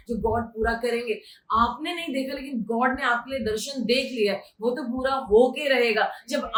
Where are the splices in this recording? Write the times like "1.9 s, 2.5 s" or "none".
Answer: none